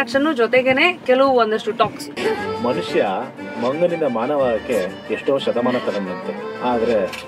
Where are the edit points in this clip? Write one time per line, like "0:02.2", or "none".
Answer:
0:02.1